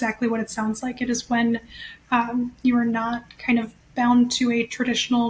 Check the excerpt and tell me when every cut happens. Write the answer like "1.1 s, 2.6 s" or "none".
none